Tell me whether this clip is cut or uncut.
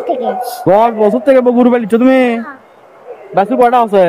uncut